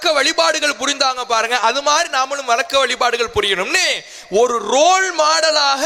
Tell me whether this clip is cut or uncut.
uncut